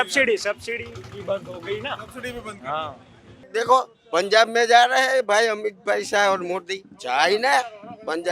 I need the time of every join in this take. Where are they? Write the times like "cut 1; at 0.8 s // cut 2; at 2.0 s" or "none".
cut 1; at 3.4 s